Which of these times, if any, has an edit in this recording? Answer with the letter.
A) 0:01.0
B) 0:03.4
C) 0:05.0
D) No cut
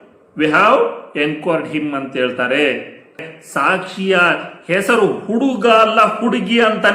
B